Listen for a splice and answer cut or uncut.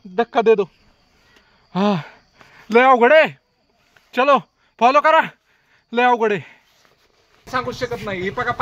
cut